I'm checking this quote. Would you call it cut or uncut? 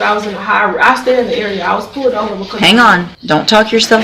cut